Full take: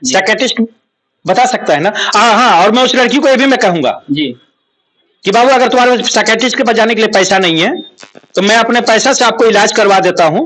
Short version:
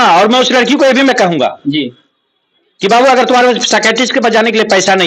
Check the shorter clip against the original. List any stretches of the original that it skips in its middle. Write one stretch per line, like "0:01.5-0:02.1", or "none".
none

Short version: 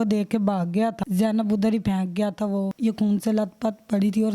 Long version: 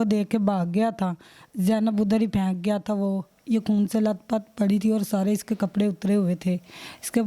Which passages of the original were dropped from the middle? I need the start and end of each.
0:01.0-0:01.5
0:03.2-0:03.4

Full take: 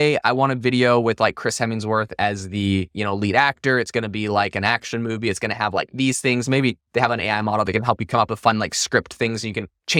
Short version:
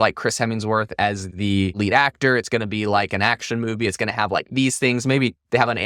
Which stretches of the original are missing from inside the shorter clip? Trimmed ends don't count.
0:02.6-0:02.8

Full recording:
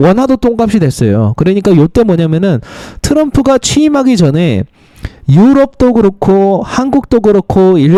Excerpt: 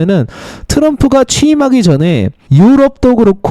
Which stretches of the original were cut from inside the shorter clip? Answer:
0:04.7-0:05.1

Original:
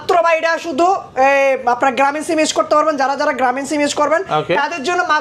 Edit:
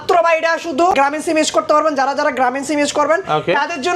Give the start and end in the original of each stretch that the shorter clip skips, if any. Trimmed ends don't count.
0:00.9-0:01.9

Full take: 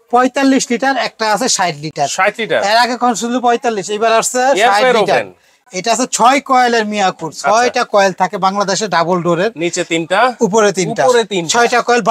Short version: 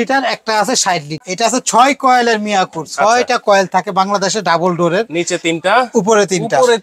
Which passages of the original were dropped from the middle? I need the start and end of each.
0:01.8-0:05.6

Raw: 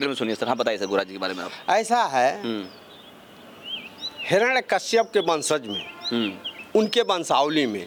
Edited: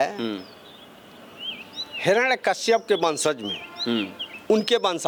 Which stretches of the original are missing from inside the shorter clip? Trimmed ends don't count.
none

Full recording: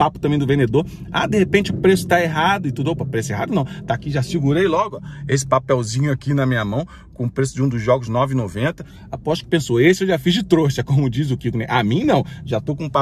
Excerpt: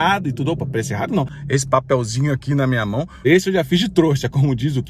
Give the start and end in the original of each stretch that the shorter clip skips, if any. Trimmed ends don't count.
0:03.7-0:05.1
0:07.0-0:09.8

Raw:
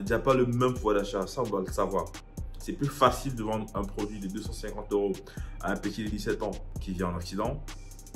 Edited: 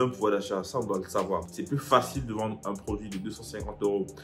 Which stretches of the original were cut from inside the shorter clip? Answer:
0:02.2-0:02.6

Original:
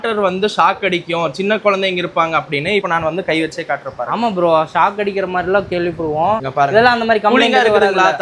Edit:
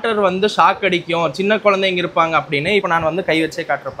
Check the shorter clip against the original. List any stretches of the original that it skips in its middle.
none

